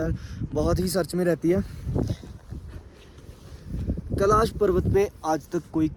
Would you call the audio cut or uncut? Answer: uncut